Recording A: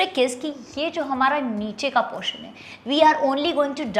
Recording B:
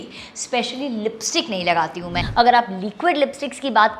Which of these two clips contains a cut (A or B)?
B